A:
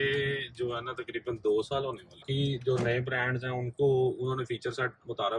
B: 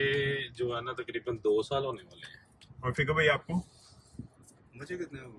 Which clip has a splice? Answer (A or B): A